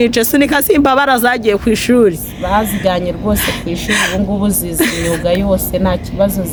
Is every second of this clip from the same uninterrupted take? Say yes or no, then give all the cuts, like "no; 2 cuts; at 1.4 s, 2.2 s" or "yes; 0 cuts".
yes; 0 cuts